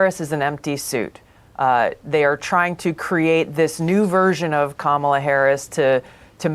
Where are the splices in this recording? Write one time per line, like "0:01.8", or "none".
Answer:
none